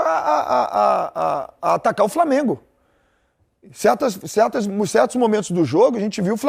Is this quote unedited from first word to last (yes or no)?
yes